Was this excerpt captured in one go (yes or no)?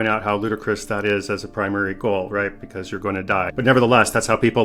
no